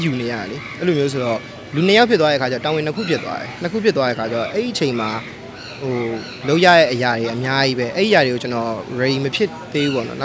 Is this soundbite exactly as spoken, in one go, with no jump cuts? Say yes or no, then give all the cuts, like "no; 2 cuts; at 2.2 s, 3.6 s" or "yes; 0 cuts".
yes; 0 cuts